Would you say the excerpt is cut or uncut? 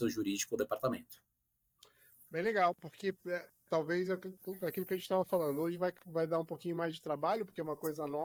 uncut